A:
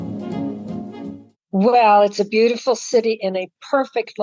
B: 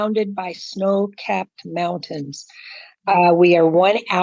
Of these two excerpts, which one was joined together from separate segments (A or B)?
A